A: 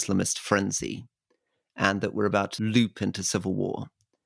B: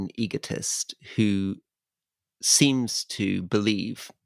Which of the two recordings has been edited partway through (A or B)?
A